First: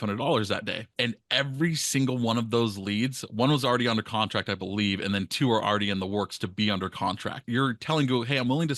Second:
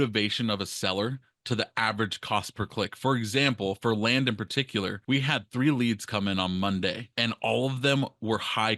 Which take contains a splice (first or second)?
first